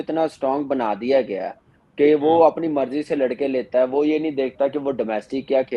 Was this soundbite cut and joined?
no; 0 cuts

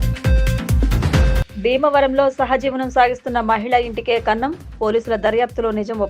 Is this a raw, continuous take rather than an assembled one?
no; 1 cut; at 1.1 s

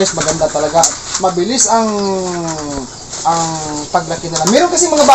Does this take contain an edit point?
no; 0 cuts

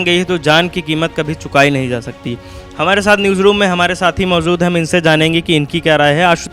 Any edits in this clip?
no; 0 cuts

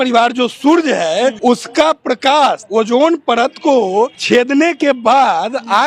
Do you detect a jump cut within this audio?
yes; 3 cuts; at 1.4 s, 2.6 s, 4.2 s

